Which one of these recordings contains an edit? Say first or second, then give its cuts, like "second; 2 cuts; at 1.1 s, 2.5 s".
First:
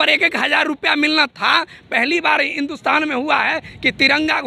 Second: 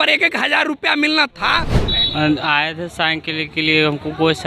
second; 1 cut; at 1.8 s